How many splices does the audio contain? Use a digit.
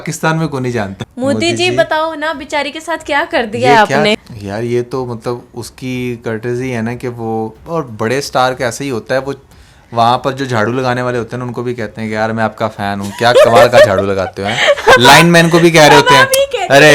2